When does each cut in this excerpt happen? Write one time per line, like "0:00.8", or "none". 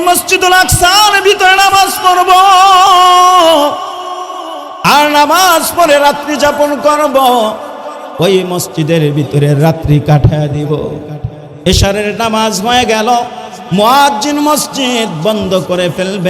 none